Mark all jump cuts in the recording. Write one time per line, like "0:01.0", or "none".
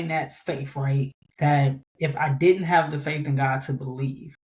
0:01.2

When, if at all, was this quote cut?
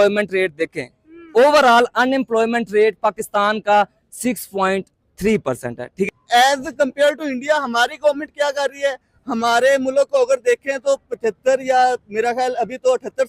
0:06.1

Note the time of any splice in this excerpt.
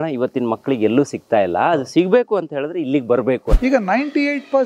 0:03.6

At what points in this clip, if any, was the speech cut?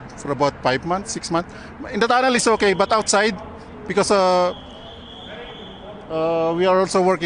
none

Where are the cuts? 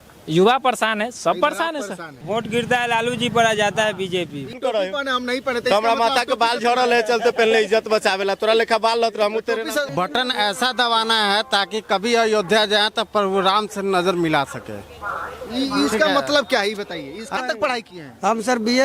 0:02.1
0:04.6
0:09.9
0:17.3

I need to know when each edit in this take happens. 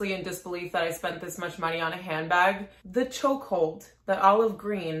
0:02.7

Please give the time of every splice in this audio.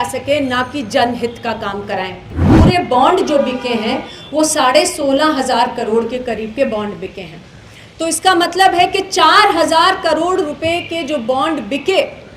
0:02.5

